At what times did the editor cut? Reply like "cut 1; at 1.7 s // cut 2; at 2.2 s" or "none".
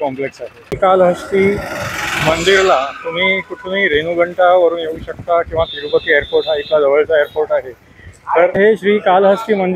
cut 1; at 0.8 s // cut 2; at 8.6 s